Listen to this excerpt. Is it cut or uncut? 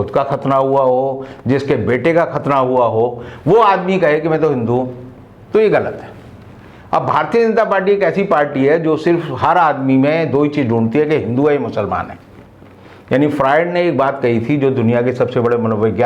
uncut